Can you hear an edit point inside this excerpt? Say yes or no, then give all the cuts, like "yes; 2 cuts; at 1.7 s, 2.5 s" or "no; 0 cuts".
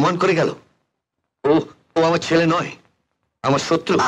no; 0 cuts